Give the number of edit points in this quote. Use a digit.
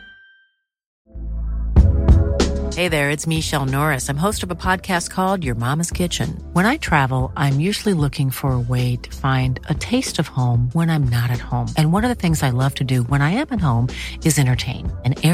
1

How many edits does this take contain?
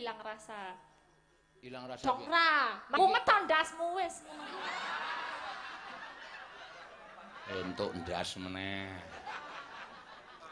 1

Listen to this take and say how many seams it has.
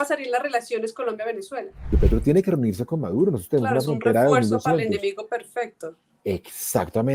1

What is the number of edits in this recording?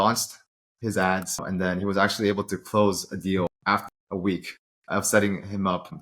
2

